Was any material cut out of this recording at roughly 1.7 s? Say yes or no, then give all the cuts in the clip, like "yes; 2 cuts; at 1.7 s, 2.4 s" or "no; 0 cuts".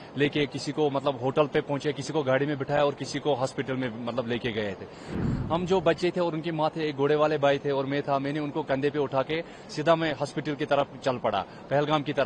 no; 1 cut; at 5.2 s